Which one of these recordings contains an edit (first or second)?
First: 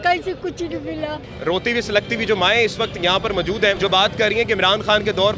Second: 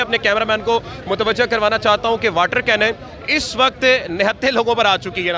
first